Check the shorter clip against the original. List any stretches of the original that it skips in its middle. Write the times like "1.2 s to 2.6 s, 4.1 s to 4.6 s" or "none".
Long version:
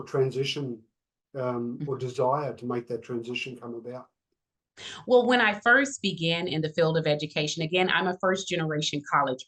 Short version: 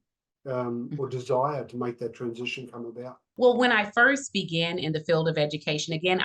4.1 s to 4.9 s